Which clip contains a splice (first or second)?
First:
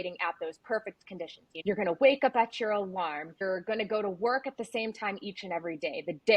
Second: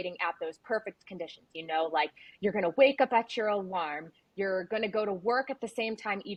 first